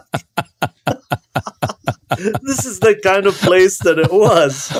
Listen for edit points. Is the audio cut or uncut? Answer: uncut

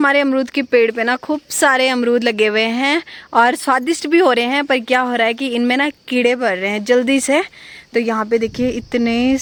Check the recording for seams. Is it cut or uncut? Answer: uncut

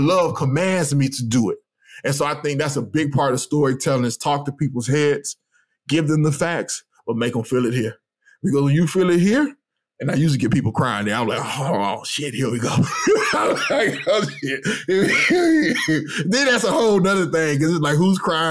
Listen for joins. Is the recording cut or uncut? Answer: uncut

